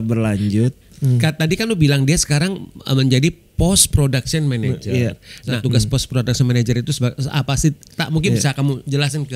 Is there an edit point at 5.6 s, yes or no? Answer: yes